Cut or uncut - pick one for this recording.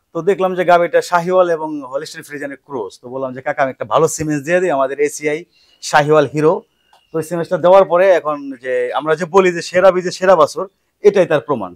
uncut